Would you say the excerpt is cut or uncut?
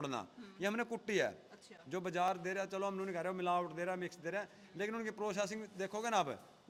uncut